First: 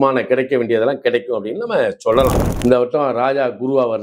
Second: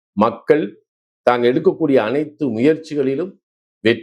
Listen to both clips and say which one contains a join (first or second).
first